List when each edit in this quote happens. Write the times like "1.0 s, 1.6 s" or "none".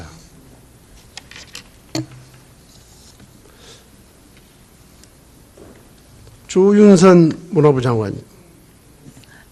7.2 s